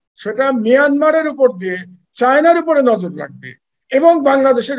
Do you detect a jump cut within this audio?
no; 0 cuts

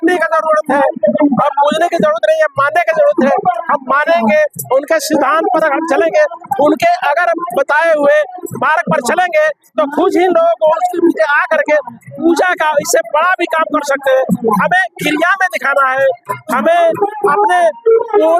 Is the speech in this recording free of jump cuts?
yes; 0 cuts

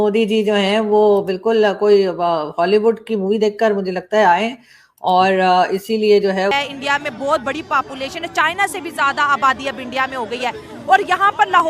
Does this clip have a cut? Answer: yes; 1 cut; at 6.5 s

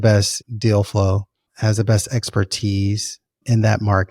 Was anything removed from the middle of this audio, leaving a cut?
no; 0 cuts

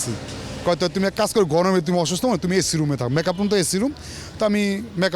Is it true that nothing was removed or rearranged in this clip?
yes; 0 cuts

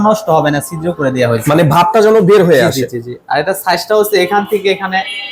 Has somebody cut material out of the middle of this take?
no; 0 cuts

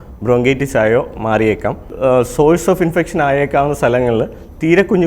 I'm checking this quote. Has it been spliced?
yes; 1 cut; at 1.9 s

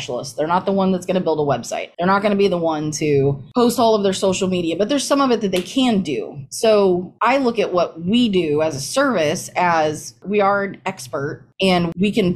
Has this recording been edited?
no; 0 cuts

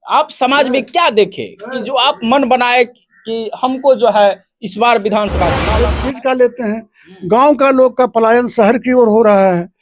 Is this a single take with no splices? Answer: no; 1 cut; at 5.7 s

